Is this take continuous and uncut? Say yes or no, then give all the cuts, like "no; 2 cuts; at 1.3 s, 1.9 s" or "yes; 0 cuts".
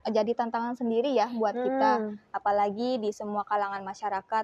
yes; 0 cuts